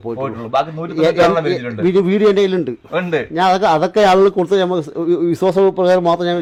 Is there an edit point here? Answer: no; 0 cuts

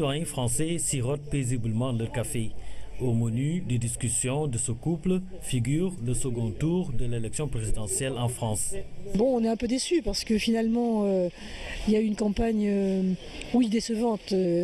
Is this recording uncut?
no; 1 cut; at 10.0 s

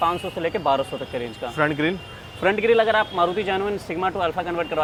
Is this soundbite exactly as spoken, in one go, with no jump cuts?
yes; 0 cuts

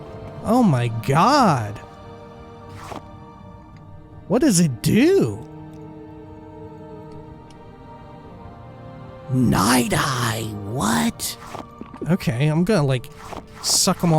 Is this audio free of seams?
no; 1 cut; at 11.9 s

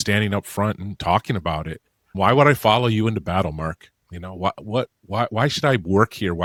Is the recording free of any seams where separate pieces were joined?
yes; 0 cuts

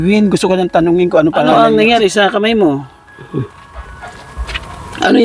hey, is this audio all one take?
no; 1 cut; at 1.5 s

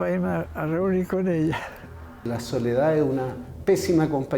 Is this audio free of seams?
no; 1 cut; at 2.1 s

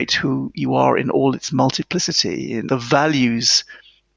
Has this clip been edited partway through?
yes; 1 cut; at 2.6 s

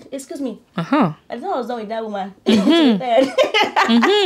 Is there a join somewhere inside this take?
no; 0 cuts

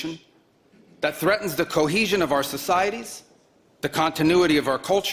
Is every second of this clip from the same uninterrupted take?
yes; 0 cuts

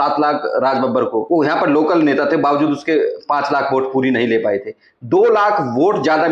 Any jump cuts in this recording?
yes; 1 cut; at 1.2 s

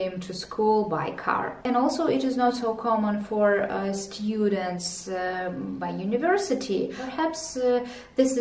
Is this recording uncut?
yes; 0 cuts

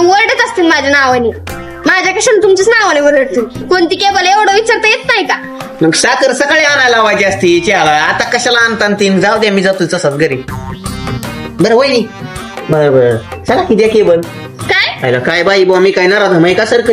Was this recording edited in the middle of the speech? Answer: no; 0 cuts

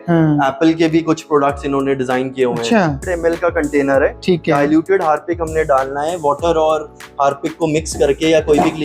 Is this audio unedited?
no; 1 cut; at 3.1 s

